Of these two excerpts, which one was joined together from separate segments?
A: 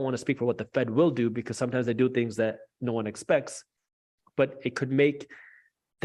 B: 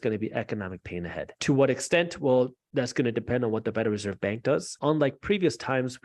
B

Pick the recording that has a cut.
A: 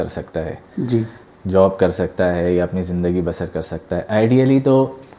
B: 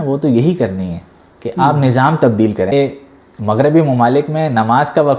B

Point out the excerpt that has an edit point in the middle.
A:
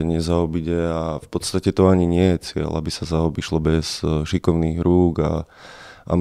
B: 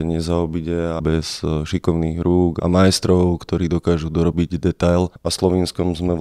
B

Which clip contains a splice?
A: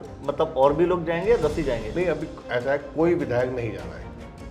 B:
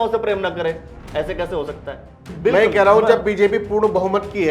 B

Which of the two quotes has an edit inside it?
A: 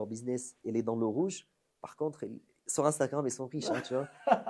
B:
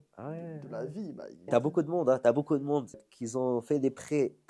B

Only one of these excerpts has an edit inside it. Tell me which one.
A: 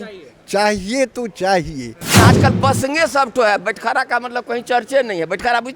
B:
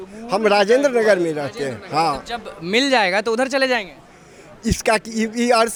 A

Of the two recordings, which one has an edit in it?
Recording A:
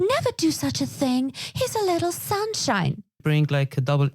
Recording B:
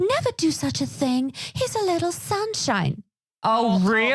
A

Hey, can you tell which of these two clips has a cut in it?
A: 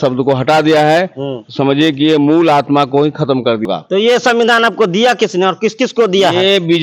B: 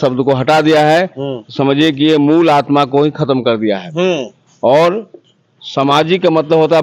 A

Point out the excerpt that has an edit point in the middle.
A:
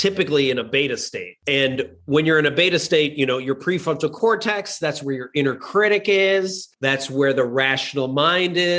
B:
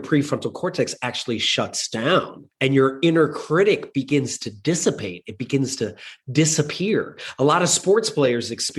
A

